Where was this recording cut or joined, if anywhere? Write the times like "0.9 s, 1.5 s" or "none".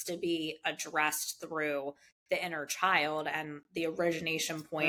none